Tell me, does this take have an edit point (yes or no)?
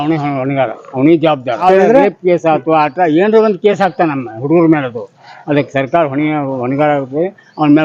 yes